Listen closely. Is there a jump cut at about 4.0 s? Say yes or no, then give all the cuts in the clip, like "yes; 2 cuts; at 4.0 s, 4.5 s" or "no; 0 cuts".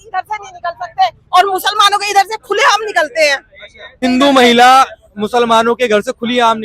yes; 1 cut; at 4.0 s